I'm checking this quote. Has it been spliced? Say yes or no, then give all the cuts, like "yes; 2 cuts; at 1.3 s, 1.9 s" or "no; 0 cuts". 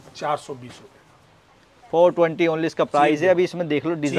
no; 0 cuts